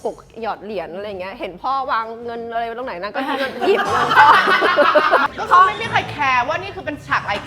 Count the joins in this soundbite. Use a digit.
1